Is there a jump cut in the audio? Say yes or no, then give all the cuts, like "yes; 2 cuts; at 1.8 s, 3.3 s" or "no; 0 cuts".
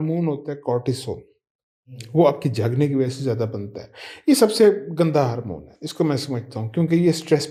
no; 0 cuts